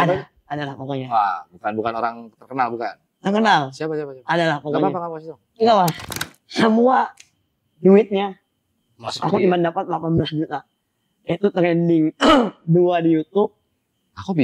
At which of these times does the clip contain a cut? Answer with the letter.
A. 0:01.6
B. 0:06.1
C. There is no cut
B